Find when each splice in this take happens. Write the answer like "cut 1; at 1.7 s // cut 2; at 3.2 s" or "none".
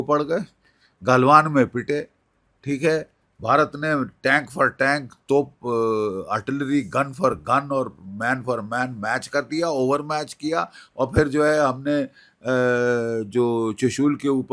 none